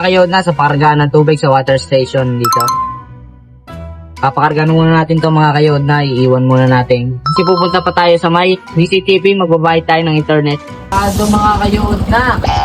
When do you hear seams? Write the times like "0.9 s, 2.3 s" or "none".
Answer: 10.9 s